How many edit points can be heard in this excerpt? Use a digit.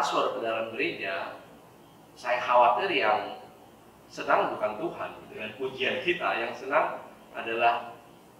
0